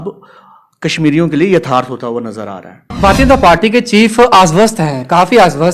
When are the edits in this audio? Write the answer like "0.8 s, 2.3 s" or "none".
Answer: 2.9 s